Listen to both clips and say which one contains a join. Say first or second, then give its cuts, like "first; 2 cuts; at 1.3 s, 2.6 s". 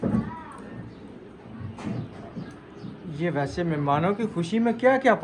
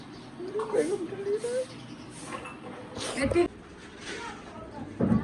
second; 1 cut; at 3.5 s